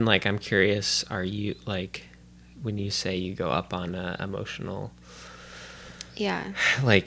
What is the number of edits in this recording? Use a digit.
0